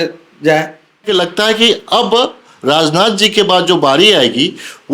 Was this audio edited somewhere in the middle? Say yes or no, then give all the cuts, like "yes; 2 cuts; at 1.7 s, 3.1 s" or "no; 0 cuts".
yes; 1 cut; at 1.0 s